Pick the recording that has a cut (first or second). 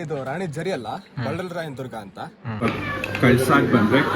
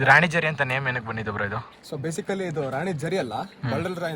first